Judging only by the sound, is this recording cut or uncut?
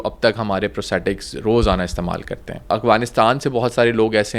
cut